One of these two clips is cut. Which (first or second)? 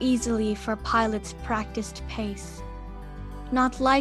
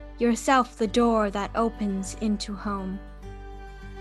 second